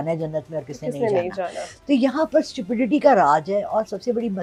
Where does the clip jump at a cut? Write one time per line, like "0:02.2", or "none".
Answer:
none